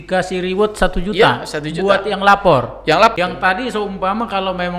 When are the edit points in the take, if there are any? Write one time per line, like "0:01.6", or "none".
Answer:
0:03.1